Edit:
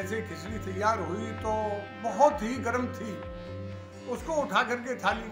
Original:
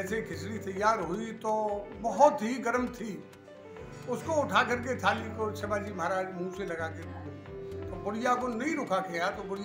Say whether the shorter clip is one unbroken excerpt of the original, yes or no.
yes